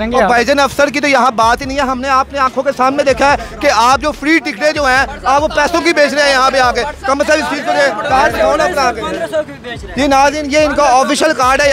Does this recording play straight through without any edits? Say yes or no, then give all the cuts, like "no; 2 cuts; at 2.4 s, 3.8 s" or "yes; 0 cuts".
yes; 0 cuts